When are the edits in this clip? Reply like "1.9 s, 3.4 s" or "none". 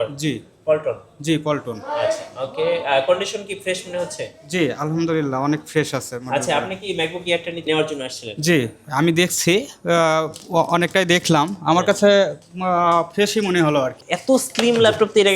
7.6 s, 14.1 s